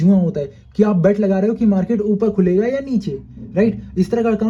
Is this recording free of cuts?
yes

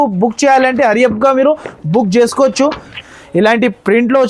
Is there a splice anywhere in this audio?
yes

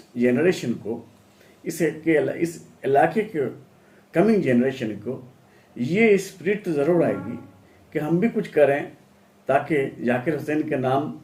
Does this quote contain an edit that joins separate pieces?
no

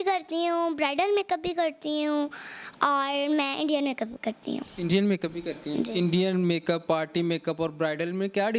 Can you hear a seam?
no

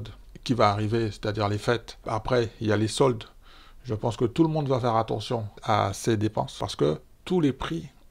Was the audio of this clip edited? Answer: yes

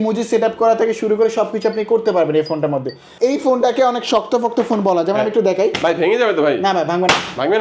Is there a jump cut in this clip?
yes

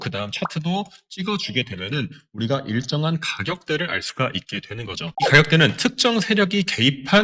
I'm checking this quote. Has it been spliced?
yes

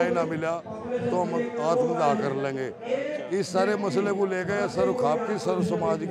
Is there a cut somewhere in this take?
no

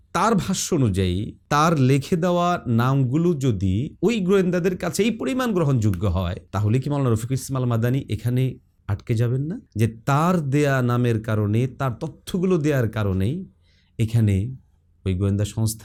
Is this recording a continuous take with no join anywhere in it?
yes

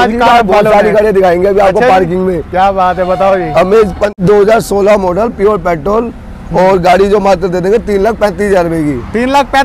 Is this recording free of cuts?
yes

